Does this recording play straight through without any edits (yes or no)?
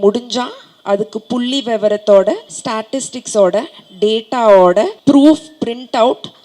no